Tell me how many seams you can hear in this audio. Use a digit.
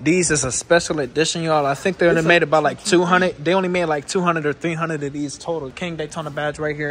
1